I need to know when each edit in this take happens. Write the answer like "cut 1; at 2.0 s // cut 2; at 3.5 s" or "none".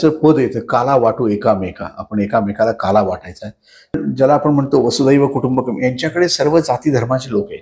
cut 1; at 4.0 s